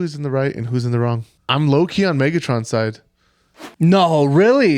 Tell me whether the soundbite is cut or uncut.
cut